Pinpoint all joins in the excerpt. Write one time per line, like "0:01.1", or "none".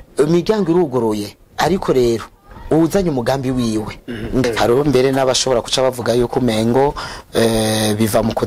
0:04.4